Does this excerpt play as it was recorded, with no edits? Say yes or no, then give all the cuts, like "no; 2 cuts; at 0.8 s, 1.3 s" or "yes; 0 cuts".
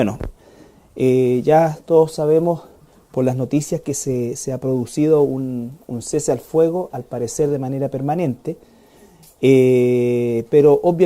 no; 1 cut; at 5.8 s